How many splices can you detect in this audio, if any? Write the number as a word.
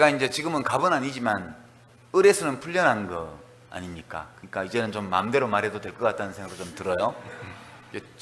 one